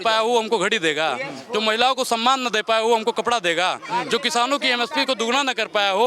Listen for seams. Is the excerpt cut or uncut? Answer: uncut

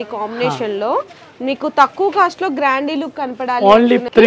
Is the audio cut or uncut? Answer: uncut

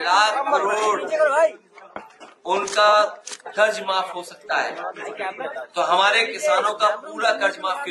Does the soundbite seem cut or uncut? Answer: uncut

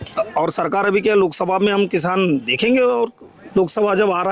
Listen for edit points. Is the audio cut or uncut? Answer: uncut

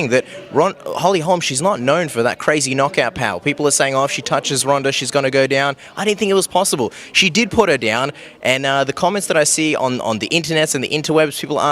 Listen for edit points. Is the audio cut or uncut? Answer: cut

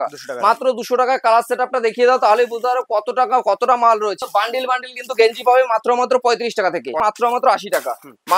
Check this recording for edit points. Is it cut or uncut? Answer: cut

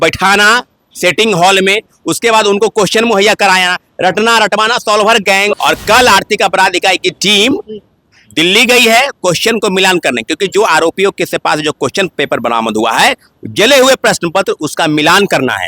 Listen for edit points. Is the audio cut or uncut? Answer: cut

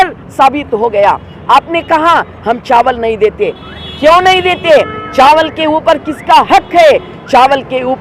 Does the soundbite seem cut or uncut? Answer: uncut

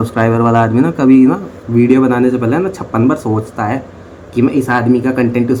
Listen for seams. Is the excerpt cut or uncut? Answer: uncut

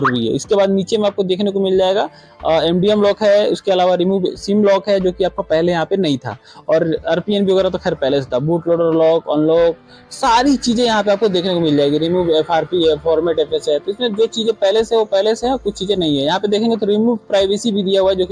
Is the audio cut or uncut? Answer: uncut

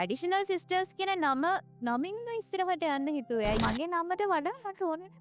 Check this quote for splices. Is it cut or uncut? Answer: cut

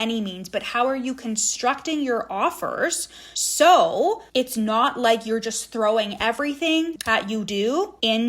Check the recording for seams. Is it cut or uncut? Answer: cut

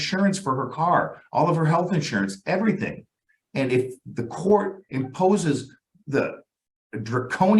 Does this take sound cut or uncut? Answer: uncut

